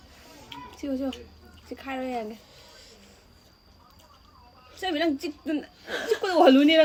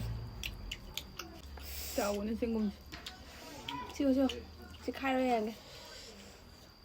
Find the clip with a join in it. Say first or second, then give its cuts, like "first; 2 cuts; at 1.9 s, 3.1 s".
second; 1 cut; at 1.4 s